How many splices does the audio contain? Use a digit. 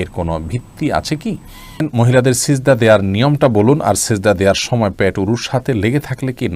1